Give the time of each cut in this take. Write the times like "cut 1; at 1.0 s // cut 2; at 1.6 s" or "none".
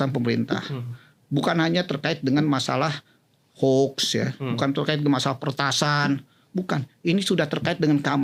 none